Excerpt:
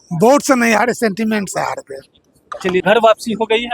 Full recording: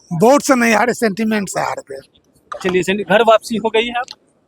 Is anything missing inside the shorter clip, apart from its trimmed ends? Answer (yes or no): yes